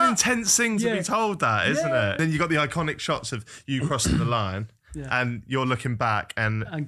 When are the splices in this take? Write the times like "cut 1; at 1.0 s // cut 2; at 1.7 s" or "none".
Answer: cut 1; at 2.2 s